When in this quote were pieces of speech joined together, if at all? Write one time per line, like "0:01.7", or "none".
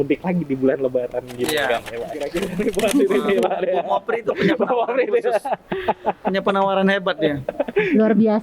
0:02.3